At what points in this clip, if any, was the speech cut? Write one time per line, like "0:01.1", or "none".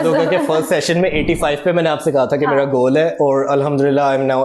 none